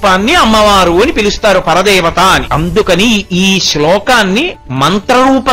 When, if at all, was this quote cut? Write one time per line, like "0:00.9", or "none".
0:02.5
0:04.6